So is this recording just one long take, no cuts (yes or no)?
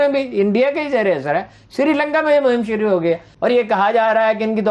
no